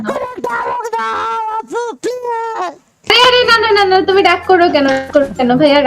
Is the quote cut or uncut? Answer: cut